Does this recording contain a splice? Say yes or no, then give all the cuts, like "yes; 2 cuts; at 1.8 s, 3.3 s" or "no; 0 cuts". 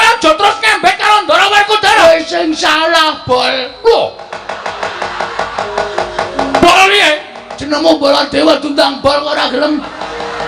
yes; 1 cut; at 2.0 s